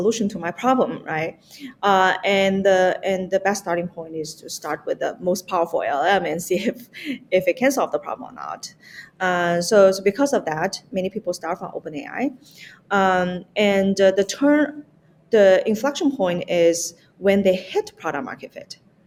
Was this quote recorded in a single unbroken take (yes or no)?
yes